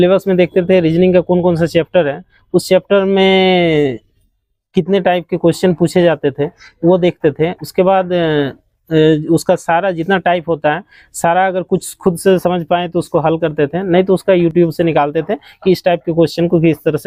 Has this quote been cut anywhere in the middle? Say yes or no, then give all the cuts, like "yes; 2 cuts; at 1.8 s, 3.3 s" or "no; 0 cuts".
no; 0 cuts